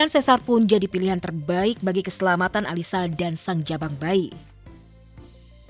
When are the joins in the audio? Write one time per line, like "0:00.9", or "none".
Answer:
0:04.3